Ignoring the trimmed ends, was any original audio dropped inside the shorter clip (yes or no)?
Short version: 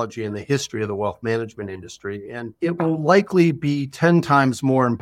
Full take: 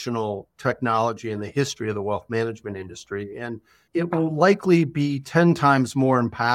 yes